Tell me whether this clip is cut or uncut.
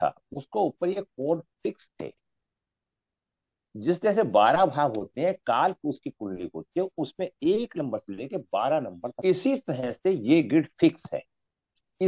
cut